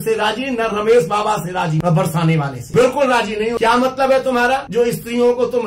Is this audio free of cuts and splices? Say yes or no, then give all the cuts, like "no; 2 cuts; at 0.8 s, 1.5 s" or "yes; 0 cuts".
no; 4 cuts; at 1.8 s, 2.6 s, 3.5 s, 4.7 s